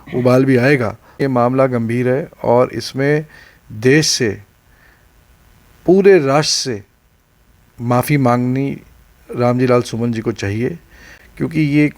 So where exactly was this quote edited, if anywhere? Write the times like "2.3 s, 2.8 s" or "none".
1.2 s